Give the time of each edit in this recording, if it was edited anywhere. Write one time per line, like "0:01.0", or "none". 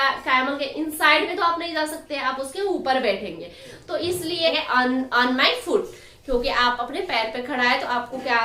0:04.5